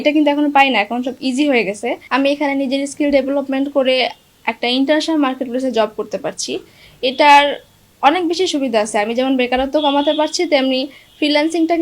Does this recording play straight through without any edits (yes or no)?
no